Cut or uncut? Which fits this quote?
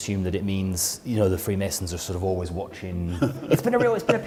uncut